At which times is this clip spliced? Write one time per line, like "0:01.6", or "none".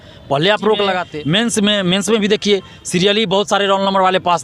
0:01.1